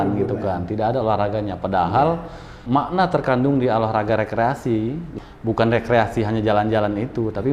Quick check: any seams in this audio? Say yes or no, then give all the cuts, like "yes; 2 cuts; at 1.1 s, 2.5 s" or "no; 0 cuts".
yes; 2 cuts; at 2.5 s, 5.1 s